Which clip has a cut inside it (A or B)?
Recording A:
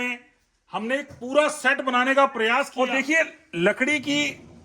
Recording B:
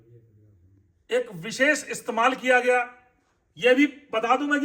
A